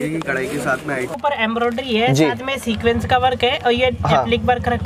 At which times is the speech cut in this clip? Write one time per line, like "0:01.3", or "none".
0:01.1